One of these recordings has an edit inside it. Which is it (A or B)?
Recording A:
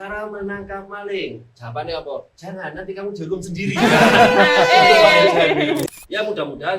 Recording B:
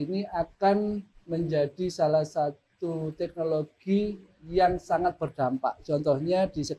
A